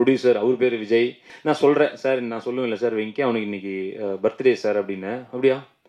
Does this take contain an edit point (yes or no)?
yes